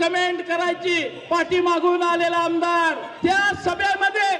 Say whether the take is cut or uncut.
cut